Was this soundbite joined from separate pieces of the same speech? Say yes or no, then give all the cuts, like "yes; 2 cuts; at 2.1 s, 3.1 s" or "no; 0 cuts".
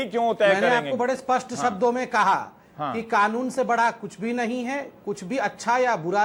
no; 0 cuts